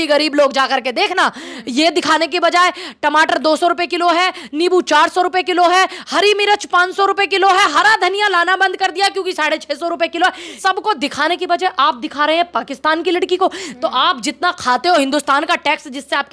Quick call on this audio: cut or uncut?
cut